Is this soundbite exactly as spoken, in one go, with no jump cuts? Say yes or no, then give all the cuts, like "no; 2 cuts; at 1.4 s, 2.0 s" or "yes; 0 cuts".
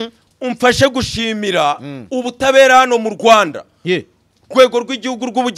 yes; 0 cuts